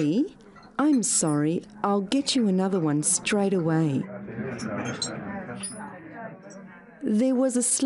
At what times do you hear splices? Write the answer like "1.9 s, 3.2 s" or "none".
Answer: 4.1 s

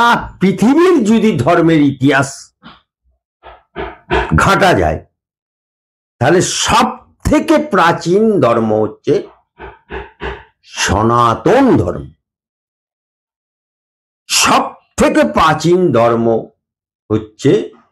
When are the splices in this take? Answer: none

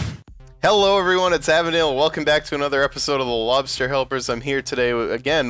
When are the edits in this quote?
none

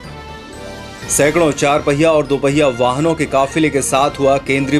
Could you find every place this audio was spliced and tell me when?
1.0 s

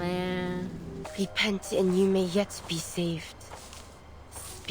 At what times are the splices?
1.0 s

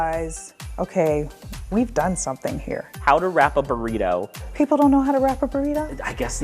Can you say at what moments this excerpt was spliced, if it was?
2.9 s, 4.4 s

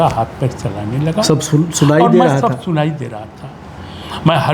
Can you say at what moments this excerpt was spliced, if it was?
none

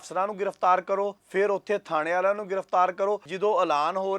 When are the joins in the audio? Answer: 1.2 s, 3.3 s

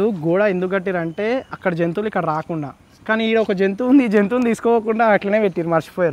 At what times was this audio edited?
none

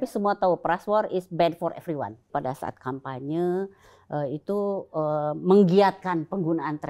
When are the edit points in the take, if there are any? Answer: 2.3 s

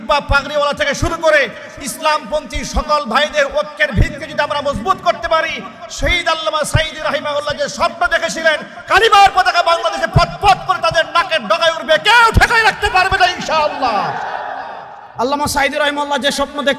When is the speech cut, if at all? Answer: 15.1 s

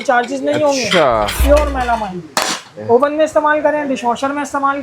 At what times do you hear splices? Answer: 1.4 s, 2.8 s

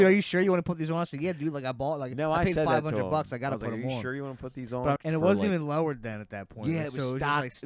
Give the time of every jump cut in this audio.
5.0 s

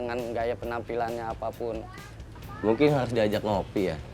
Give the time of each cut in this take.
none

